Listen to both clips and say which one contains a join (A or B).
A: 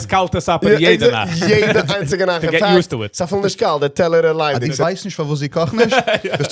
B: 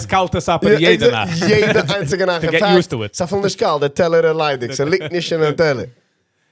A